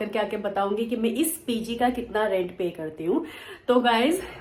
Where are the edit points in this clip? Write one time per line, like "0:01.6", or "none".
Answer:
none